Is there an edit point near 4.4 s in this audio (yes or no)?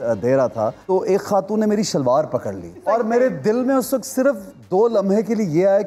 no